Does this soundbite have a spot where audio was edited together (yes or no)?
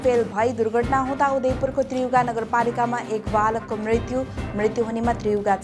no